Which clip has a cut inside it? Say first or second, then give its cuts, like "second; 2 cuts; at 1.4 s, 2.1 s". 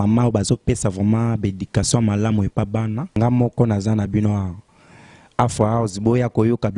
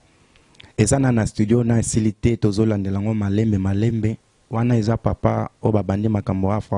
first; 1 cut; at 3.2 s